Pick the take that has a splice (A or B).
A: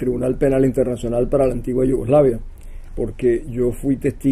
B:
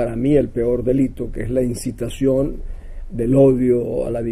A